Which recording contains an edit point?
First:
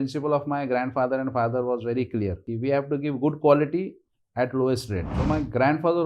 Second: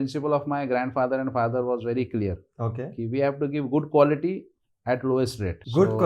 first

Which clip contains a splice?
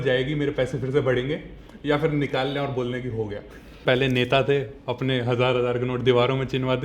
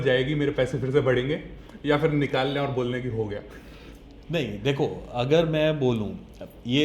first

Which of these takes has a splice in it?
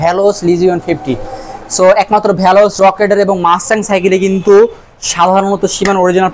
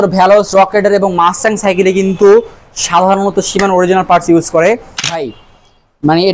second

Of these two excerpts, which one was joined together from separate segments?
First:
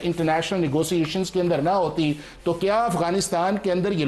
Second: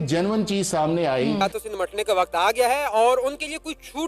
second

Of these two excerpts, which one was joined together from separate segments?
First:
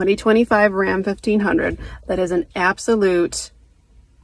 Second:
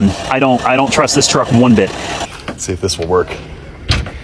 second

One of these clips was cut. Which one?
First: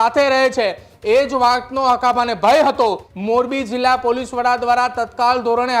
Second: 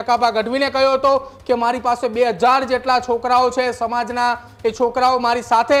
first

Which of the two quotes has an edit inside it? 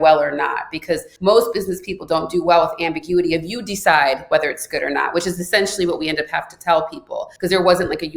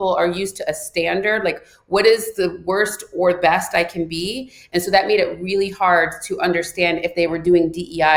first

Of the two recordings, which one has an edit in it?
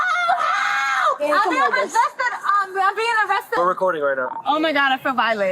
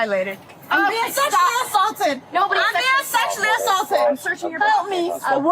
first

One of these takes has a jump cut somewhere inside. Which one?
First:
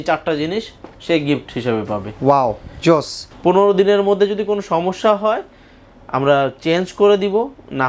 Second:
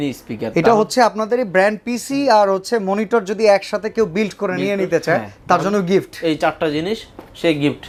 first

